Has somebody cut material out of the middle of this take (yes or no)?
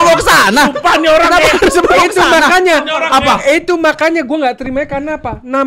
no